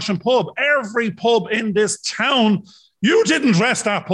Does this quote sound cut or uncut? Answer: uncut